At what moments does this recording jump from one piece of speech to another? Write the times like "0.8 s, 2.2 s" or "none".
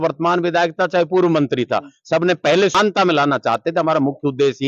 2.7 s